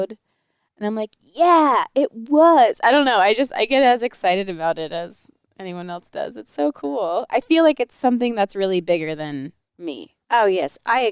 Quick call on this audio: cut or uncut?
uncut